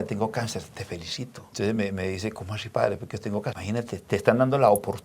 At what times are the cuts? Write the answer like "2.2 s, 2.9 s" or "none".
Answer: 1.5 s, 3.6 s

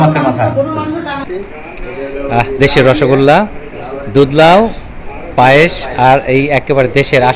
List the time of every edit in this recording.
1.2 s

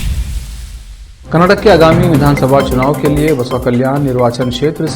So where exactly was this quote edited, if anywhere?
1.1 s

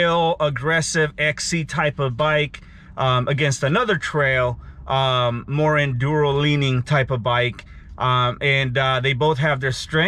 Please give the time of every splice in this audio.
none

